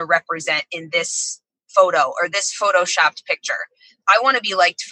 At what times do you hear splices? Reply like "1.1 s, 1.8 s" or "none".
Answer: 3.9 s